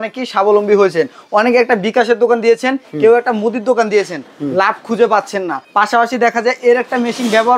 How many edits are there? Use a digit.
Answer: 1